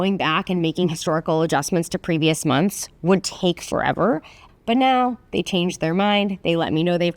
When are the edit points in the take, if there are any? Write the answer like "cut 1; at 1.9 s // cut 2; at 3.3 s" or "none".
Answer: cut 1; at 4.4 s